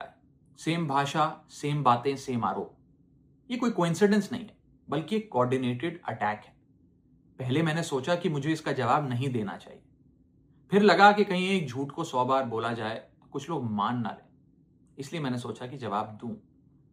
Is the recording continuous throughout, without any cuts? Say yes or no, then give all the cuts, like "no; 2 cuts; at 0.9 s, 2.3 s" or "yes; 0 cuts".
yes; 0 cuts